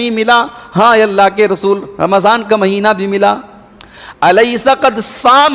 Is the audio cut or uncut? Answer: uncut